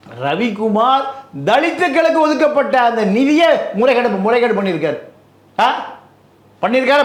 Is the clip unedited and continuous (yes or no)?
yes